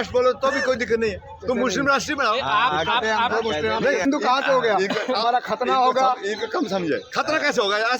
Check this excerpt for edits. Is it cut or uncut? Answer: cut